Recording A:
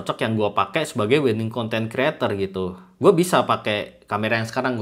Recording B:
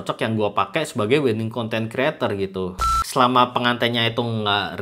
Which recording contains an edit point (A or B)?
B